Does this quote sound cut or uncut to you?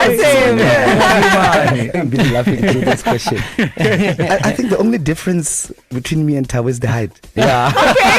cut